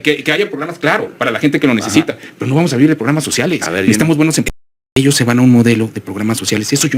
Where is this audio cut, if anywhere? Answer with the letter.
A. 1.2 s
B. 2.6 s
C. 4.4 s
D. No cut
C